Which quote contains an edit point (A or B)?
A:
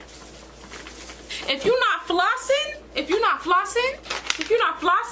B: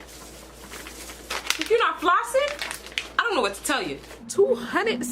B